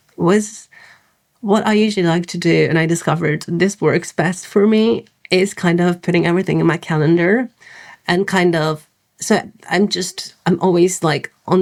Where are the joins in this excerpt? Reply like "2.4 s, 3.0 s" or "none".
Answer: none

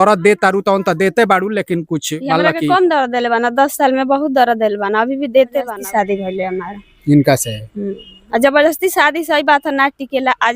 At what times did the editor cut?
5.7 s

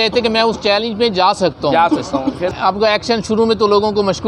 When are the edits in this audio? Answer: 2.5 s

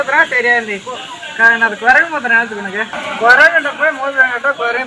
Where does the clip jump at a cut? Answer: 2.9 s

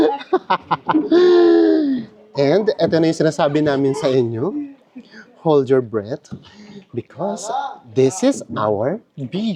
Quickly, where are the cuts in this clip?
none

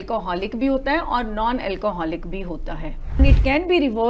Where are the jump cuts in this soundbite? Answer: 3.2 s

